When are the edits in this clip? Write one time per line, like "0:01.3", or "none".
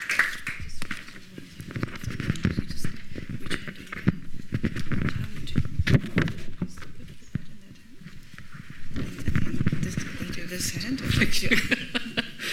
none